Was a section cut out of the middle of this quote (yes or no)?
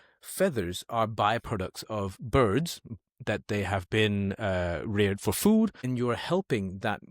yes